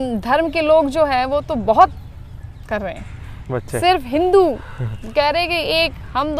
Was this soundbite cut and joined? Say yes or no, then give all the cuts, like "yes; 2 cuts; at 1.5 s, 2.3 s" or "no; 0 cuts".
no; 0 cuts